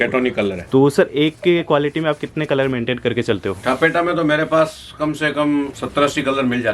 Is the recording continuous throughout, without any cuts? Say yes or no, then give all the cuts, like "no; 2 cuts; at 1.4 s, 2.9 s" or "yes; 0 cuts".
no; 1 cut; at 5.8 s